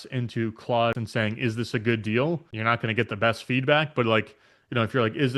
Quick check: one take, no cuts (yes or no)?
no